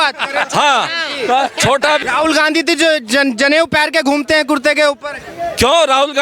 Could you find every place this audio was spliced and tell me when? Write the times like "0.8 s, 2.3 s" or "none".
2.0 s